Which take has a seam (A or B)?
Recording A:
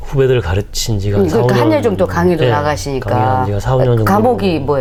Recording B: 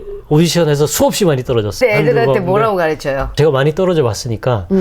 B